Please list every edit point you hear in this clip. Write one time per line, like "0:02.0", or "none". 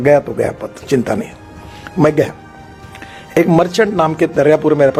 none